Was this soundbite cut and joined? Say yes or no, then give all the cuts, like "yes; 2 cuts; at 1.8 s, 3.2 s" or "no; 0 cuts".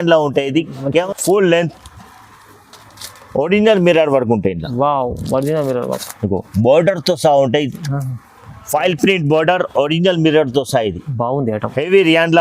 yes; 1 cut; at 1.1 s